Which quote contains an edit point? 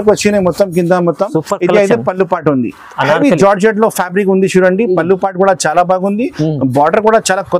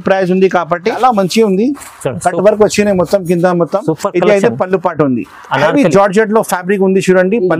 second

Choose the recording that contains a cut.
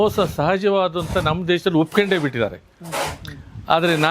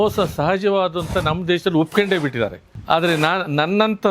second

